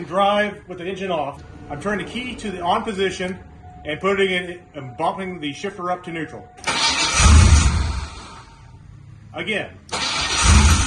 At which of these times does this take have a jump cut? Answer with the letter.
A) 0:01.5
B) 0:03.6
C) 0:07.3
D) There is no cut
A